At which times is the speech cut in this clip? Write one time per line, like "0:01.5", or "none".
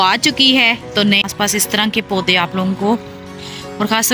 0:01.2